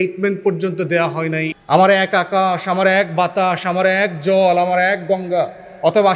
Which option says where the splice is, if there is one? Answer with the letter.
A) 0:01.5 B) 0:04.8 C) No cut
A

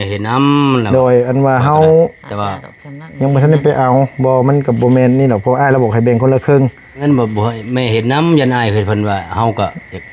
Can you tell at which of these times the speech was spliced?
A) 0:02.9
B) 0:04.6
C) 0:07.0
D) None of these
C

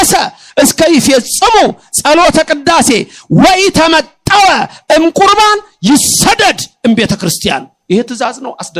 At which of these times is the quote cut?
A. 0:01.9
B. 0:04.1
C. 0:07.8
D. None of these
D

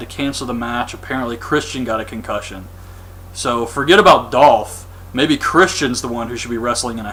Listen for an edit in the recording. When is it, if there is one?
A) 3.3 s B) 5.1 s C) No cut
C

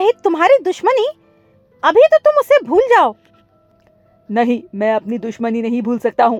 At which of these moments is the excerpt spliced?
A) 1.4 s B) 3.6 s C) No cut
C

